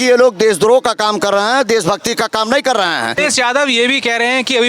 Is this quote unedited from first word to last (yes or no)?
no